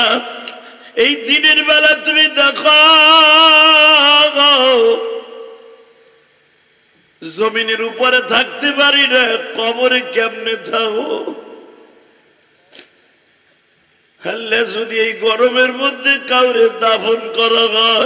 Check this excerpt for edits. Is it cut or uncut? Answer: uncut